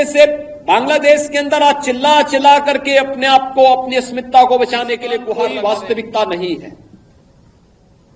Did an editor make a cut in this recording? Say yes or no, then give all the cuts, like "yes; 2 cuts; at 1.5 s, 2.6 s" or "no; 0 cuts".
yes; 1 cut; at 5.2 s